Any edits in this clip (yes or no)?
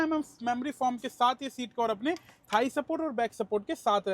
no